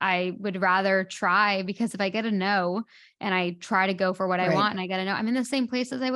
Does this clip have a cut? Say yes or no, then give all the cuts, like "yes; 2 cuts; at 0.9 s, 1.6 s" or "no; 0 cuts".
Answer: yes; 1 cut; at 1.9 s